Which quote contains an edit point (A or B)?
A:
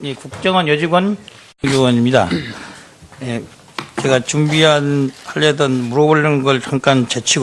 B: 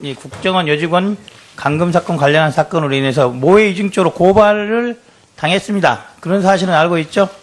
B